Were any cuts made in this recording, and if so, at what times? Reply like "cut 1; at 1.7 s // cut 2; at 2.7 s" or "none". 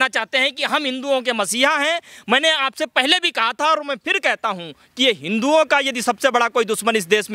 none